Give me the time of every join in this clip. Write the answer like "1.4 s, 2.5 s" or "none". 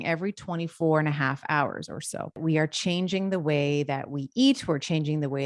2.4 s